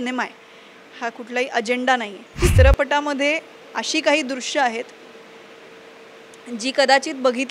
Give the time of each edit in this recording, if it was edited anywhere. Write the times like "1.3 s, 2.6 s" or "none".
2.3 s